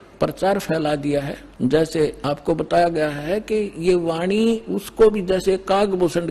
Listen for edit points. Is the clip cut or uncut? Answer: cut